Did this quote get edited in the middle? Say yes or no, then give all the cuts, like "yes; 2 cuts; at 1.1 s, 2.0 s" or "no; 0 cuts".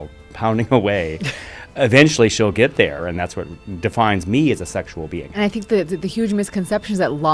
yes; 2 cuts; at 3.1 s, 5.4 s